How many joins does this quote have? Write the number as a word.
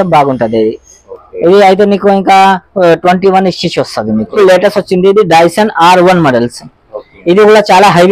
one